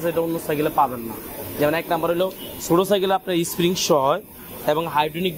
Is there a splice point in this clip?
no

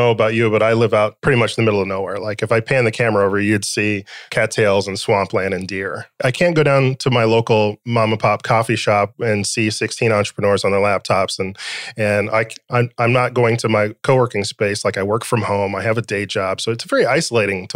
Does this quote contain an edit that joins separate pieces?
yes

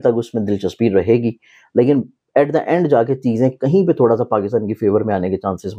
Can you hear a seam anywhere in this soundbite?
no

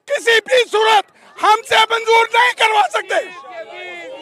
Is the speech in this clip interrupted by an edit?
no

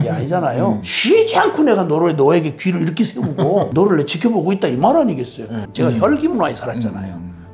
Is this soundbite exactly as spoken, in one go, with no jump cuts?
no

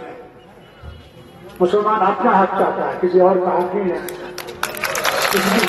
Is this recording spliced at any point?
no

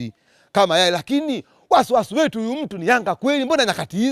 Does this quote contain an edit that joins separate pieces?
no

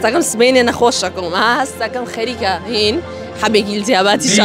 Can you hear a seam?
no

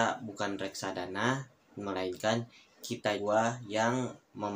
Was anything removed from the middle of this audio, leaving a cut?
yes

